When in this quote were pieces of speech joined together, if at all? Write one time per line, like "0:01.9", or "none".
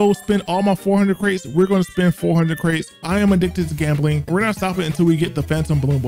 0:03.0
0:04.3